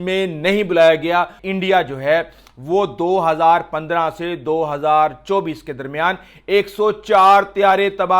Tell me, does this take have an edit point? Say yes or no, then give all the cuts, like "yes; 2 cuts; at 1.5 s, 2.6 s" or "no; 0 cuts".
yes; 1 cut; at 1.4 s